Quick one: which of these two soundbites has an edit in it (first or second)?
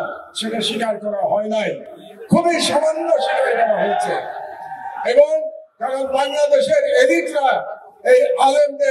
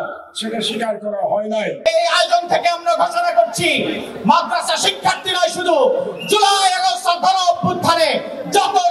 second